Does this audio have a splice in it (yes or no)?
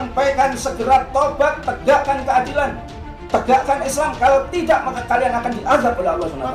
no